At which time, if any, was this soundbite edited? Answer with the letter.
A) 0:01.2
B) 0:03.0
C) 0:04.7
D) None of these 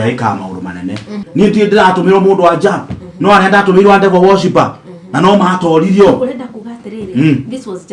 A